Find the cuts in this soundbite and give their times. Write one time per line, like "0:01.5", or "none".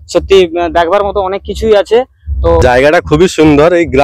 0:02.6